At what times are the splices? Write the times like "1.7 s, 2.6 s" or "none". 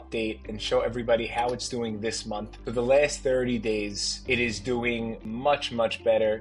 5.2 s